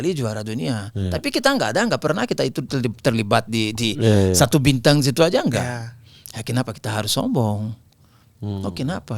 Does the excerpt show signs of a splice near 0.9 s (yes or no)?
no